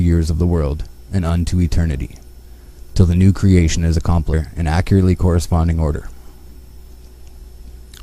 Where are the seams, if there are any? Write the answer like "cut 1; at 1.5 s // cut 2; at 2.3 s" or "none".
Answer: none

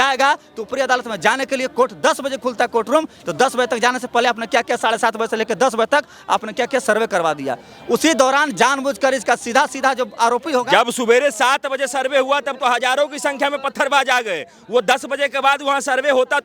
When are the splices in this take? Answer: none

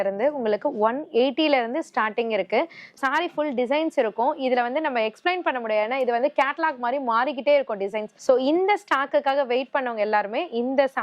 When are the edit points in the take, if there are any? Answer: cut 1; at 3.0 s // cut 2; at 8.1 s

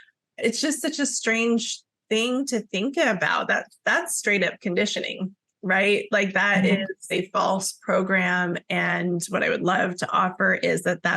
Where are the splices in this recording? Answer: cut 1; at 7.1 s

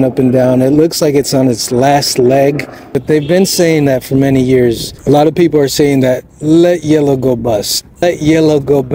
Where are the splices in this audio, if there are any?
cut 1; at 2.9 s // cut 2; at 4.9 s // cut 3; at 8.0 s

